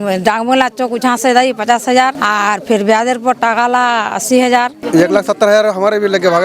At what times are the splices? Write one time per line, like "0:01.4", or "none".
0:02.2
0:04.8